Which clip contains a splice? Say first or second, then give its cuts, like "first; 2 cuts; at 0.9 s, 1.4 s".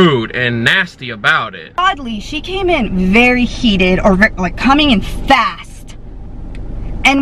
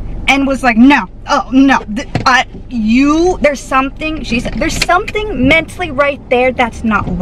first; 1 cut; at 1.6 s